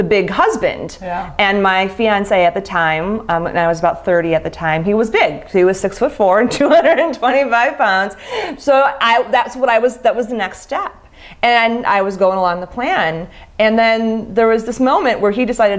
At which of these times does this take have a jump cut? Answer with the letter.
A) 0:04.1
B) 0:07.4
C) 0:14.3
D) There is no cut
C